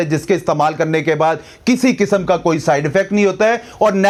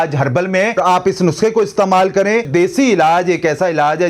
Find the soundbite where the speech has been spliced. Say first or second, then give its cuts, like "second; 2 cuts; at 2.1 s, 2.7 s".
second; 2 cuts; at 0.8 s, 2.5 s